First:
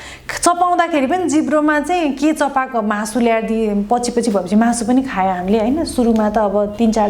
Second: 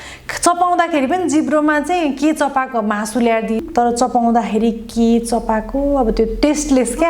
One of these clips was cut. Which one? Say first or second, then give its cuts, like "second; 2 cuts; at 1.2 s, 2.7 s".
second; 1 cut; at 3.6 s